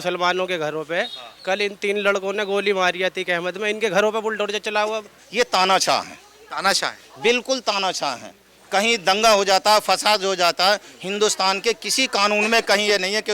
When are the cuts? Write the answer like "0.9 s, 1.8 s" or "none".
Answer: 5.2 s